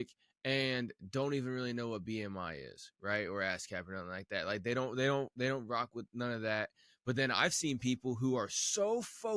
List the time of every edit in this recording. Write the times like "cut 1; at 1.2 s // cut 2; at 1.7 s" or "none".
none